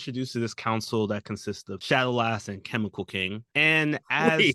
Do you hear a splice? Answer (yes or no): yes